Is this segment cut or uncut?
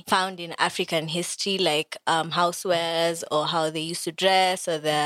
uncut